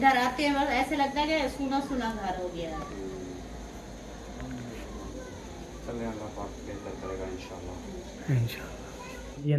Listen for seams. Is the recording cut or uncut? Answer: uncut